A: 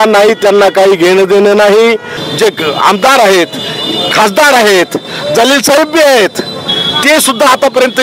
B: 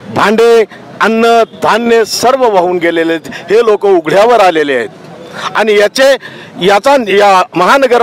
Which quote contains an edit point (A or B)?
A